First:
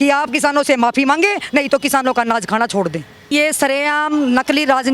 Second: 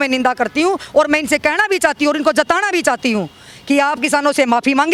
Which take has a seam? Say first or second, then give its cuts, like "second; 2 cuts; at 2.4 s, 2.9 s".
first; 1 cut; at 3.3 s